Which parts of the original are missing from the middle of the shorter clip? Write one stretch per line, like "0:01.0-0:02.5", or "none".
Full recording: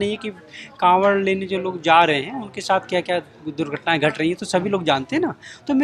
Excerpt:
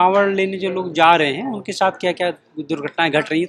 none